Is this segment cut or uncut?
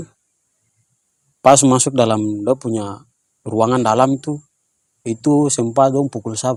uncut